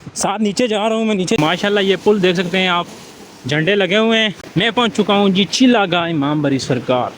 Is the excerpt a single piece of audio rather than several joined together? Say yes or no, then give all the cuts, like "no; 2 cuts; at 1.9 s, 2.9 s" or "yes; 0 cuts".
no; 2 cuts; at 1.4 s, 4.4 s